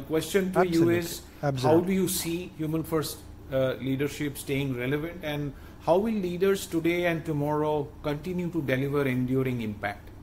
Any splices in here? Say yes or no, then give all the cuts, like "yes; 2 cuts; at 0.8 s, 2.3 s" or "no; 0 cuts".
no; 0 cuts